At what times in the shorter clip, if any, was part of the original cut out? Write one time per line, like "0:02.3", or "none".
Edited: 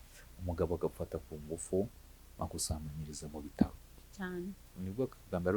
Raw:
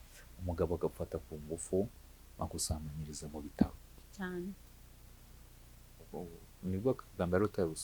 0:04.7